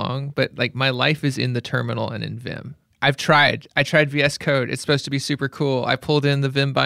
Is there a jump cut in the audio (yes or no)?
no